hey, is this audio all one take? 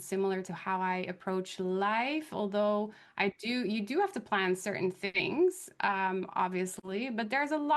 no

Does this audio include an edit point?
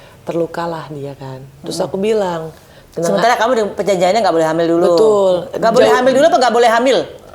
no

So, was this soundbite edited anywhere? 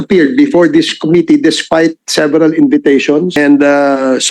yes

